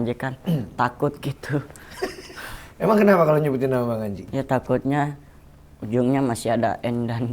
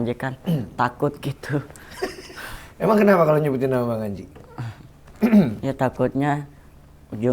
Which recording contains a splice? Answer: first; 1 cut; at 4.3 s

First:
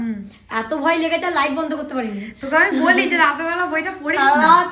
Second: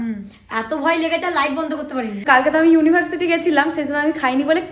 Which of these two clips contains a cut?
second; 1 cut; at 2.2 s

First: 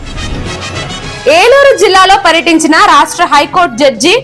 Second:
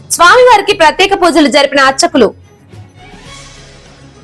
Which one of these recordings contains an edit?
first; 1 cut; at 1.2 s

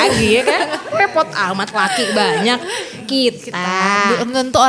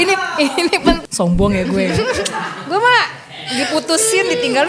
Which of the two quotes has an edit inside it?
second; 1 cut; at 1.0 s

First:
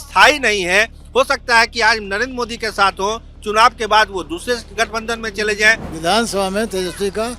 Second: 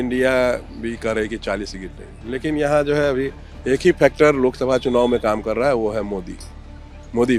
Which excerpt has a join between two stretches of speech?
first; 1 cut; at 5.9 s

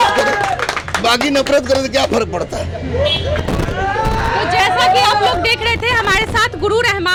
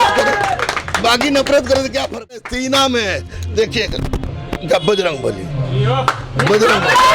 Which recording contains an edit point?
second; 1 cut; at 2.4 s

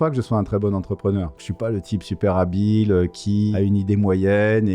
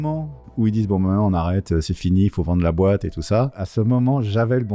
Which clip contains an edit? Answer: first; 2 cuts; at 1.4 s, 3.5 s

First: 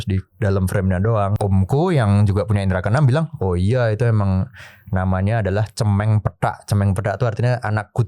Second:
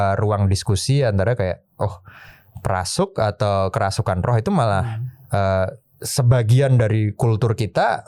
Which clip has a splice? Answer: first; 1 cut; at 1.3 s

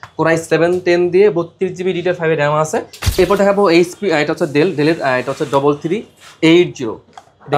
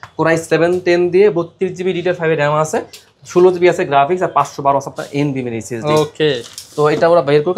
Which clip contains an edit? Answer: first; 1 cut; at 3.2 s

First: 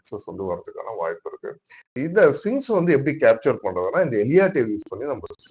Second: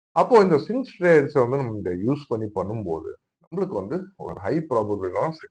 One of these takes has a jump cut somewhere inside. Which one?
first; 1 cut; at 1.8 s

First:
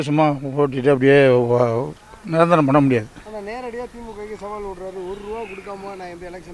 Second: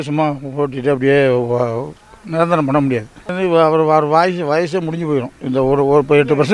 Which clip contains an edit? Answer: second; 1 cut; at 3.3 s

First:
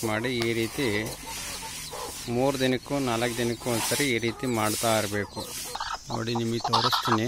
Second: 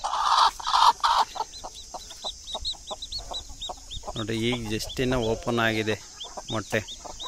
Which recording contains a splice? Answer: first; 1 cut; at 5.8 s

